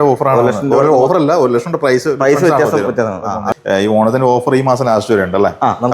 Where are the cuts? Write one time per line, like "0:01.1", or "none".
0:03.4